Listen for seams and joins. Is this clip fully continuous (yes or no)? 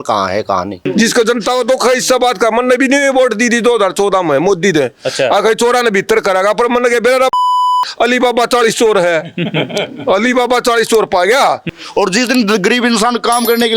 no